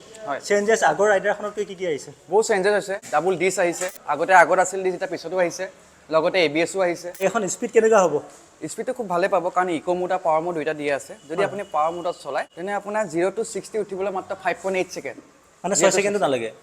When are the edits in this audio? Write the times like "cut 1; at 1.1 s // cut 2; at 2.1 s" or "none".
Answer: cut 1; at 3.9 s // cut 2; at 7.1 s // cut 3; at 12.5 s